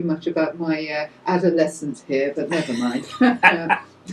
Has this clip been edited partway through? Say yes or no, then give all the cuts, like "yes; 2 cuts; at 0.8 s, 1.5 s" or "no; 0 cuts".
no; 0 cuts